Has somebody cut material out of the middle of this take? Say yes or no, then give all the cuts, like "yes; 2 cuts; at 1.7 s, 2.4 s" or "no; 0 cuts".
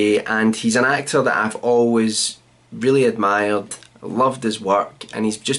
yes; 1 cut; at 3.0 s